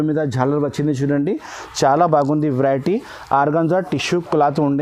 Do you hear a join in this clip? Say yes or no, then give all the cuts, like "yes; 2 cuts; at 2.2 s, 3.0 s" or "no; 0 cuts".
no; 0 cuts